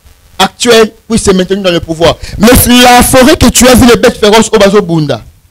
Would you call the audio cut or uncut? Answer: cut